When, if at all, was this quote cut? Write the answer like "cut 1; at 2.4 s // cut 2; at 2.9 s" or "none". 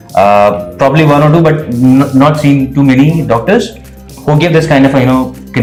none

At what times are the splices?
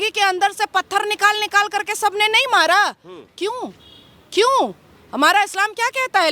none

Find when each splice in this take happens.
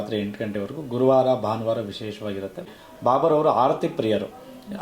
cut 1; at 2.7 s

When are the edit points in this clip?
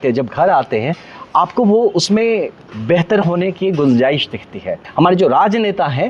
cut 1; at 4.8 s

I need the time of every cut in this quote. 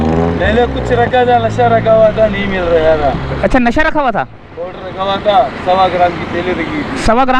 none

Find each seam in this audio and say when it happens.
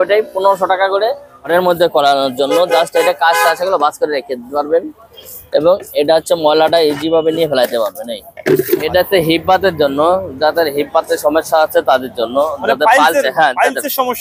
cut 1; at 1.5 s // cut 2; at 8.8 s

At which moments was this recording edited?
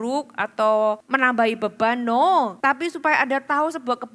cut 1; at 1.1 s // cut 2; at 2.5 s

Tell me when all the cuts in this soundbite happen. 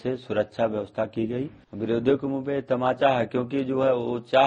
cut 1; at 1.6 s

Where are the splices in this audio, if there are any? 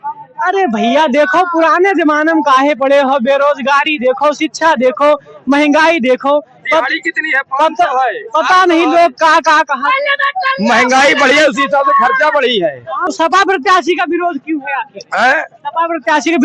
cut 1; at 13.0 s

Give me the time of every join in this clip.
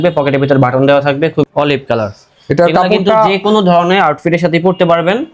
cut 1; at 1.4 s

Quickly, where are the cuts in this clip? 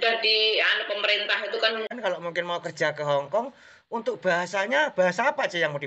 cut 1; at 1.9 s

